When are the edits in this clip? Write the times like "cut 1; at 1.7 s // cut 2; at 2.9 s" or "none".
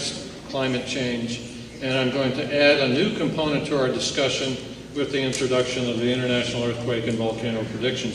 cut 1; at 3.5 s